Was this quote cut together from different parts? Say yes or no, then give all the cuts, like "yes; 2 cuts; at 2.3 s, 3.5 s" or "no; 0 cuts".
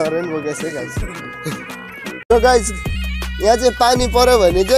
yes; 1 cut; at 2.3 s